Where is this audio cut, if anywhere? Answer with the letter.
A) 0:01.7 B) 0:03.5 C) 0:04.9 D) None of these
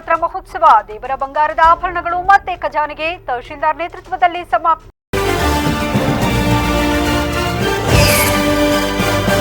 C